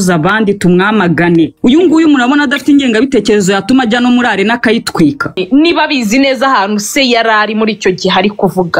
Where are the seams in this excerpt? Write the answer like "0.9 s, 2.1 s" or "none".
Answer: 1.5 s, 5.4 s